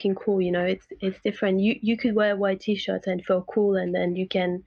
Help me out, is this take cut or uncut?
uncut